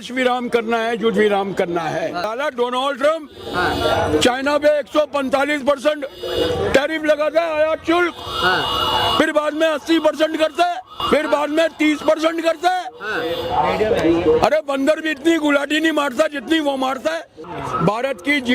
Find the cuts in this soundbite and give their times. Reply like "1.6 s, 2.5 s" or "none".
2.3 s, 11.0 s, 17.4 s